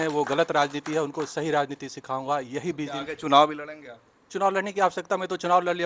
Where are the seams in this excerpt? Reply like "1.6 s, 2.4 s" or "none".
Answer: none